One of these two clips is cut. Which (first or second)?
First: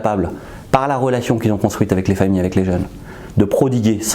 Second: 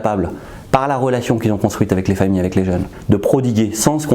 second